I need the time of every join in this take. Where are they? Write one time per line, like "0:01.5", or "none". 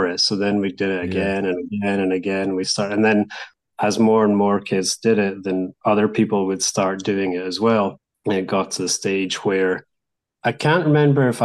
0:08.1